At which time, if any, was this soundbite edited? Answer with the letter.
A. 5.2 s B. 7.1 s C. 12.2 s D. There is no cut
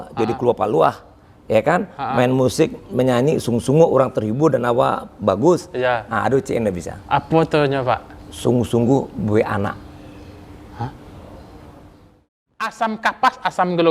C